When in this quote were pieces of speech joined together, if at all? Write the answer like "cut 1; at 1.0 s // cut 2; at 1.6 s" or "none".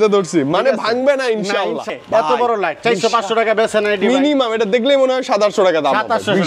cut 1; at 1.9 s